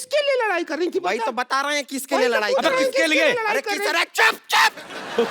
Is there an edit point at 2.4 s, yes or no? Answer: yes